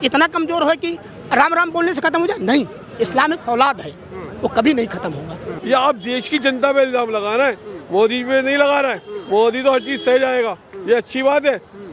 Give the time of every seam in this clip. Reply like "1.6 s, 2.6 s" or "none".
5.5 s